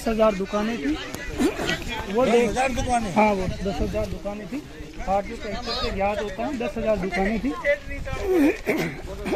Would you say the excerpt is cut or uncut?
uncut